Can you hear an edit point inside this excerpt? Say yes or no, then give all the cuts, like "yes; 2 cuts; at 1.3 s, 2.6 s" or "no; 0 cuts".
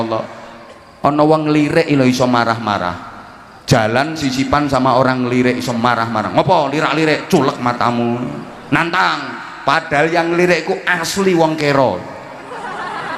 no; 0 cuts